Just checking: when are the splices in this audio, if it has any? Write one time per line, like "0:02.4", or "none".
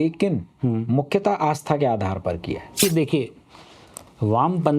0:02.8